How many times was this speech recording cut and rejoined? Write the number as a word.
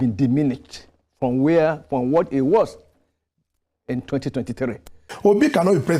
one